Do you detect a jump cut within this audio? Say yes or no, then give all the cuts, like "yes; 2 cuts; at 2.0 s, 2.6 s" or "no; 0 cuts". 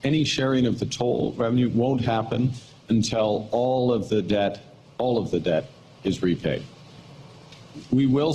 no; 0 cuts